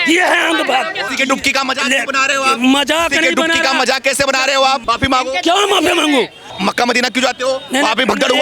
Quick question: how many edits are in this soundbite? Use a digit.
3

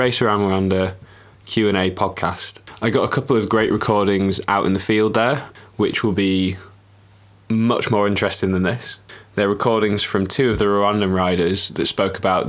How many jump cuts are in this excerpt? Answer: 0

